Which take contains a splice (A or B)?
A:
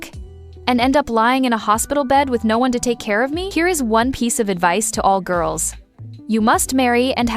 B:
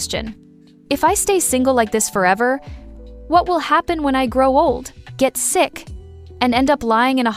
A